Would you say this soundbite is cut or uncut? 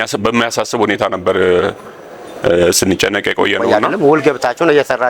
cut